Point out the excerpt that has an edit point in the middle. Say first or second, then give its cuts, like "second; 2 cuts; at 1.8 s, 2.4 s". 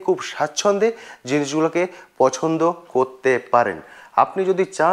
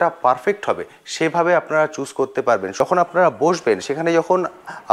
second; 1 cut; at 2.7 s